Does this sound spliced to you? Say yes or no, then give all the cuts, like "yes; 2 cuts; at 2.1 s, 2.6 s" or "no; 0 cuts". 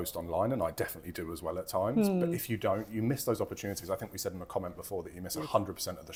no; 0 cuts